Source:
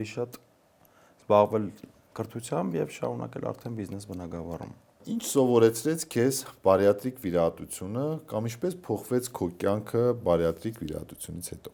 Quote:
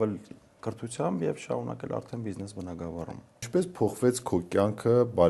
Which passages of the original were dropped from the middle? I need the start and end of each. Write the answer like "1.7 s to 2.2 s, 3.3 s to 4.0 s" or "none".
5.0 s to 8.5 s

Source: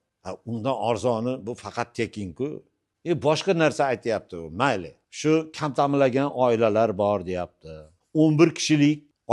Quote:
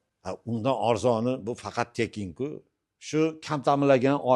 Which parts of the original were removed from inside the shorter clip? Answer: 2.9 s to 5.0 s

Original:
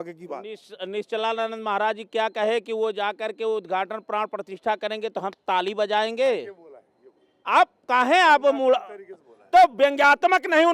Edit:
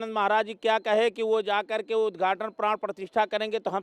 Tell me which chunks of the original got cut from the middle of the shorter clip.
none

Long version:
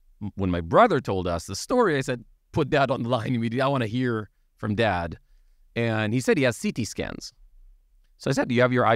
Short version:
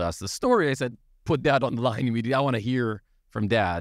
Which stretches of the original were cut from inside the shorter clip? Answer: none

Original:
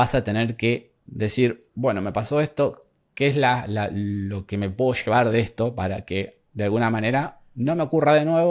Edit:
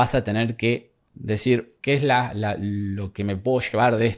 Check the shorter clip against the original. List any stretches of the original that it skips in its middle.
1.4 s to 2.7 s

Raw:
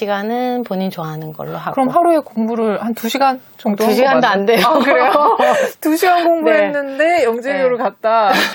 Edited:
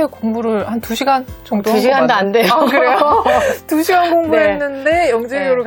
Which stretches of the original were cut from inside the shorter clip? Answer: none

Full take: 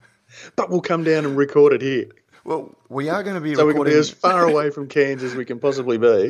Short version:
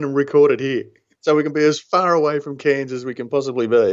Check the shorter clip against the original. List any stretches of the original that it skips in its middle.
2.4 s to 3.5 s

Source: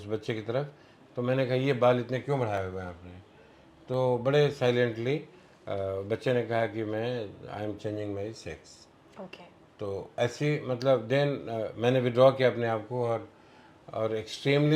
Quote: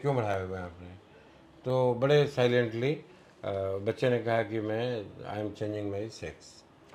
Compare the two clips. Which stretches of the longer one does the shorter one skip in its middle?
none

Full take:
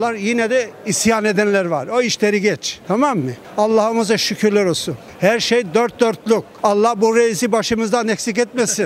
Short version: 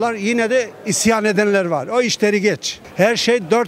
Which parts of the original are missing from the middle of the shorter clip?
2.7 s to 5.0 s

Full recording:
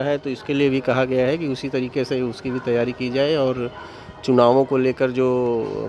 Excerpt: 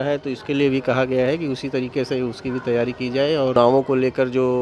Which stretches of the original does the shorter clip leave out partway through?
3.6 s to 4.4 s

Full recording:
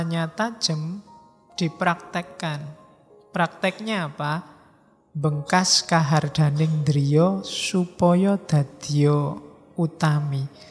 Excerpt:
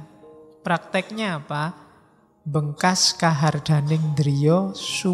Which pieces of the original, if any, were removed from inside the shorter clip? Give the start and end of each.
none

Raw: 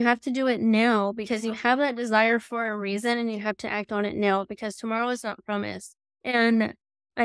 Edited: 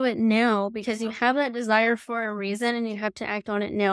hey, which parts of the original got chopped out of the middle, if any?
none

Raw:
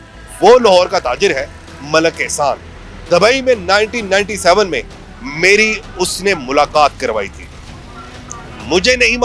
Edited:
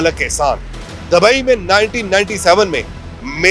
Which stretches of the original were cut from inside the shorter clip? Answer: none

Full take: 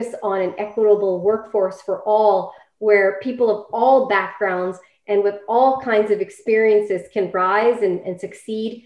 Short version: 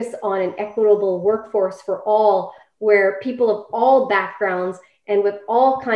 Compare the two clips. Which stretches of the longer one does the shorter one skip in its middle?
none

